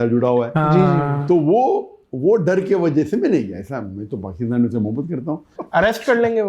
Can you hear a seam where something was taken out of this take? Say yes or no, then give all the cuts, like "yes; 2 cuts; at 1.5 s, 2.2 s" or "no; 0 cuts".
yes; 1 cut; at 5.5 s